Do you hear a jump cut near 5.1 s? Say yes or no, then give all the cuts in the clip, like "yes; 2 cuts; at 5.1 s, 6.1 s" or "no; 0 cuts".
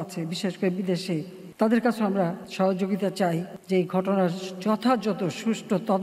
no; 3 cuts; at 1.4 s, 2.4 s, 3.5 s